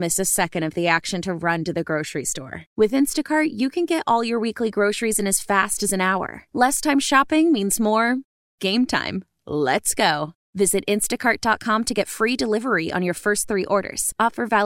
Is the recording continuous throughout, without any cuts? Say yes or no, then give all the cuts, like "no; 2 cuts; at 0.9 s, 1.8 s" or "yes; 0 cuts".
yes; 0 cuts